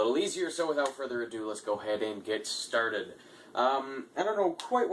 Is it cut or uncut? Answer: uncut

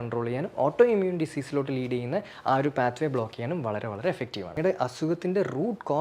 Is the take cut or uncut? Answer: cut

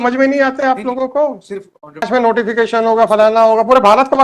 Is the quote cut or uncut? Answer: cut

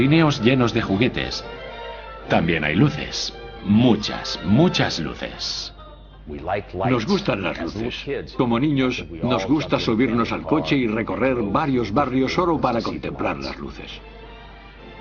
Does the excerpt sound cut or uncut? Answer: uncut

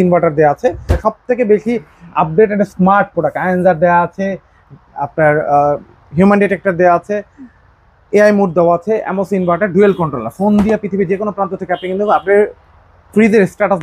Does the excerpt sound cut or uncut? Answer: cut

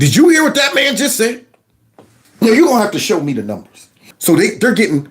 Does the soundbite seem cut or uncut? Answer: cut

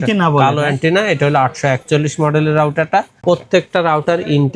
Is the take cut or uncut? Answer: cut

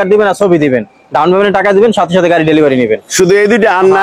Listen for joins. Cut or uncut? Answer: uncut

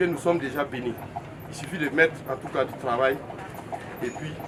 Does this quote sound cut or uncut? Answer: uncut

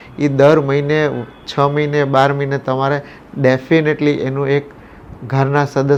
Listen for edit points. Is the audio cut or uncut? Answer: uncut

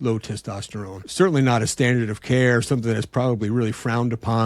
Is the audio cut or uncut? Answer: cut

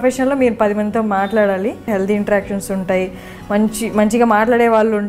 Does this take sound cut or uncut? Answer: cut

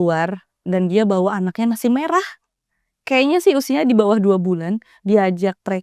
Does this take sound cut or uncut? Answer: uncut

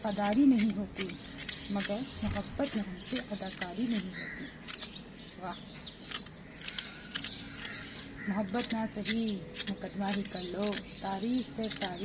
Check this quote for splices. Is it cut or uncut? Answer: uncut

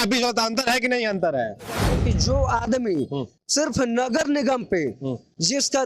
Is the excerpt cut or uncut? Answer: cut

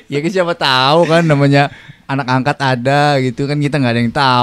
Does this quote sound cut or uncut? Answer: uncut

